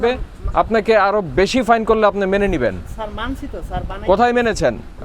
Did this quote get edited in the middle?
no; 0 cuts

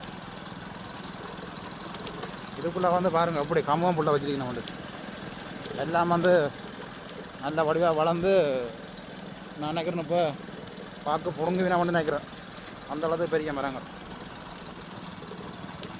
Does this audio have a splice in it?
no; 0 cuts

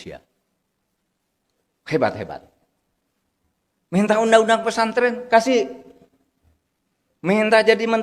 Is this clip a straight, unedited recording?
yes; 0 cuts

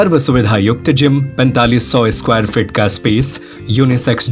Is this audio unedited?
no; 1 cut; at 1.3 s

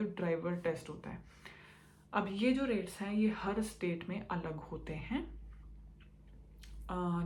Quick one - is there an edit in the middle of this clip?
no; 0 cuts

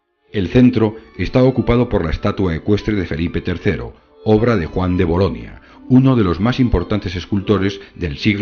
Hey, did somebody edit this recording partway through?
no; 0 cuts

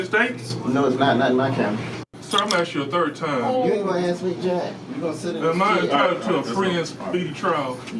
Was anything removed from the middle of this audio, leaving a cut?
yes; 1 cut; at 2.1 s

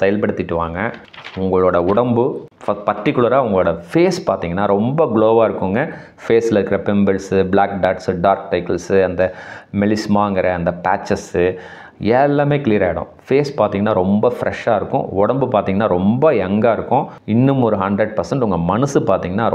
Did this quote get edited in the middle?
no; 0 cuts

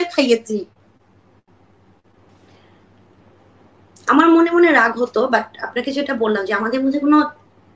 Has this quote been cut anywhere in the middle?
yes; 1 cut; at 2.3 s

